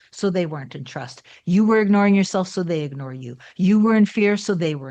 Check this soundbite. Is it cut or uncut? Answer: uncut